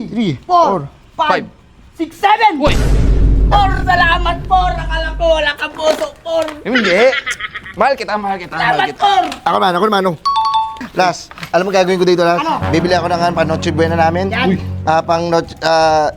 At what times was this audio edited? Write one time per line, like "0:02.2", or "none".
0:10.8